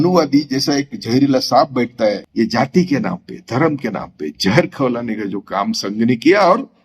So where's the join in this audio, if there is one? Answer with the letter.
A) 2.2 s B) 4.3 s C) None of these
A